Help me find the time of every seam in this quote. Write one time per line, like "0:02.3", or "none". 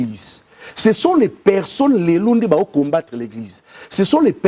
none